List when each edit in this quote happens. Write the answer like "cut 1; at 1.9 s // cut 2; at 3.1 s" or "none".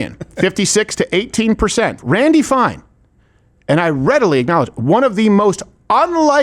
cut 1; at 2.0 s